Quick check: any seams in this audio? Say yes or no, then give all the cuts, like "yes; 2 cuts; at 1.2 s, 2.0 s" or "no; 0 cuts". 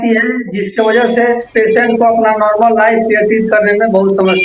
yes; 1 cut; at 1.5 s